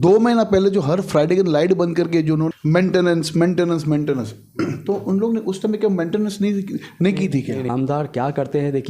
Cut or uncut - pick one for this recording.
cut